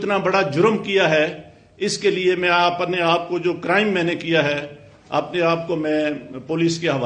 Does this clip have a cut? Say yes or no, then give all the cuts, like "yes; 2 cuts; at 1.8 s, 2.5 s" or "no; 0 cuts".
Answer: no; 0 cuts